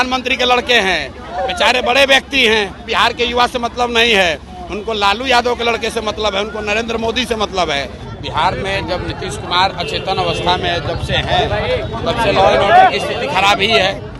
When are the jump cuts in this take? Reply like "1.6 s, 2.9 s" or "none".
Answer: 1.2 s, 2.9 s, 8.0 s